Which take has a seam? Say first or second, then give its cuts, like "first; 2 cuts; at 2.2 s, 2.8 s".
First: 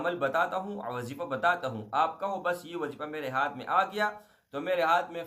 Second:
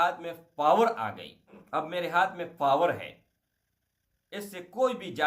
second; 1 cut; at 1.6 s